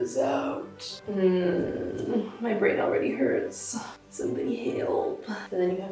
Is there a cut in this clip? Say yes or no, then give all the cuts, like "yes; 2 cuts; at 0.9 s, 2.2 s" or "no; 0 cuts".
no; 0 cuts